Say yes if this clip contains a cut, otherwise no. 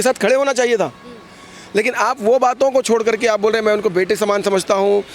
no